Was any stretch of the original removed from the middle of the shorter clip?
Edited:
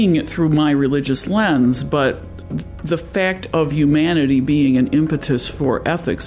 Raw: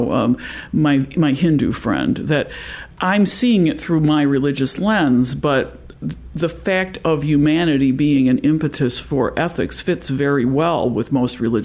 no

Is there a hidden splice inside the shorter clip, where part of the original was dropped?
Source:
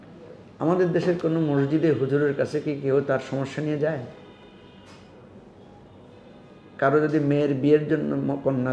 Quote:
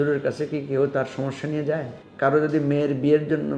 yes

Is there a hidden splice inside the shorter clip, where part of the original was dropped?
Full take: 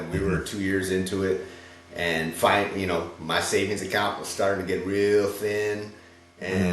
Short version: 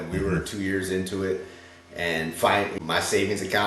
yes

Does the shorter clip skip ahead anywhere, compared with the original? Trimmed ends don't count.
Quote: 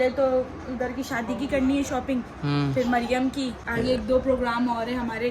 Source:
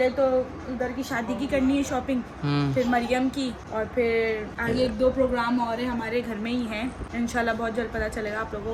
yes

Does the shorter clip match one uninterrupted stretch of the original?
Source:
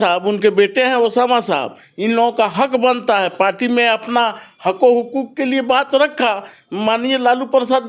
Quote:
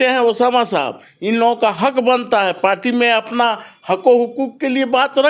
yes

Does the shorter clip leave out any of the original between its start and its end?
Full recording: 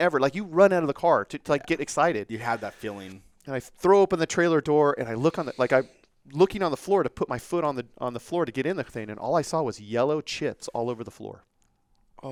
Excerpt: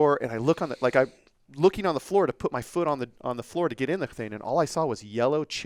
no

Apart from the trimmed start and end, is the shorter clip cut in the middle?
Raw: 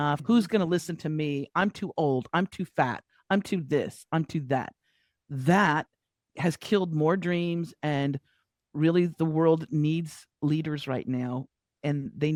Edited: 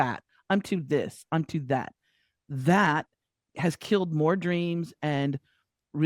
no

